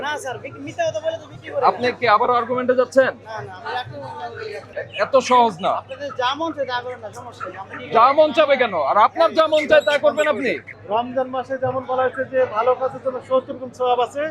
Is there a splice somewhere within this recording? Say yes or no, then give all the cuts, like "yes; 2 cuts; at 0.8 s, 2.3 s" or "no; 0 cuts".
yes; 2 cuts; at 4.7 s, 10.7 s